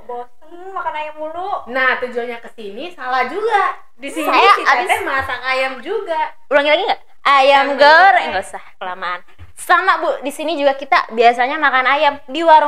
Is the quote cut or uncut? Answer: uncut